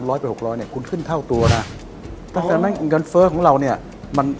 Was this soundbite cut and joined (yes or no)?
no